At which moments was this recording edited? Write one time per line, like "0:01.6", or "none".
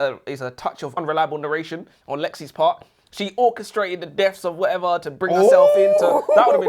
0:00.9